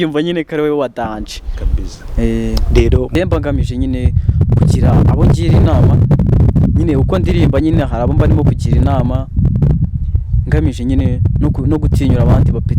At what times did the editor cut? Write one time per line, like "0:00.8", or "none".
0:03.1